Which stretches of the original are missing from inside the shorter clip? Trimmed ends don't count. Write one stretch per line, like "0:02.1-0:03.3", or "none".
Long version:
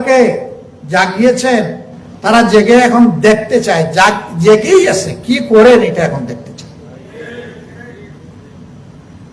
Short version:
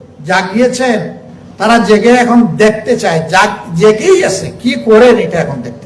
none